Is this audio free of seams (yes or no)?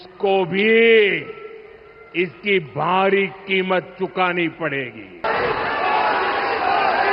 no